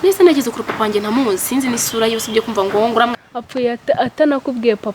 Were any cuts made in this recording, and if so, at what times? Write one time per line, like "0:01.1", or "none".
0:03.1